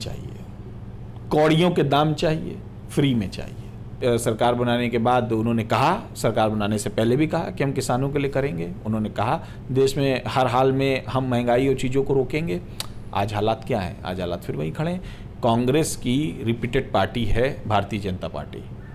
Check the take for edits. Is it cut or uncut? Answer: cut